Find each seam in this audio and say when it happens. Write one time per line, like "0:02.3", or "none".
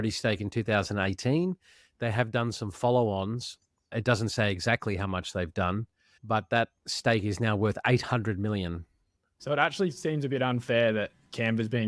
0:09.0